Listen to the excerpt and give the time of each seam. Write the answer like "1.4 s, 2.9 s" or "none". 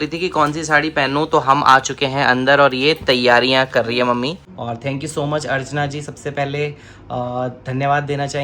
4.5 s